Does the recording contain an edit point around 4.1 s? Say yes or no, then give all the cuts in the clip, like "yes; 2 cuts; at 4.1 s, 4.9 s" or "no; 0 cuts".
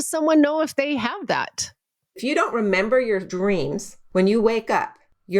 no; 1 cut; at 2.2 s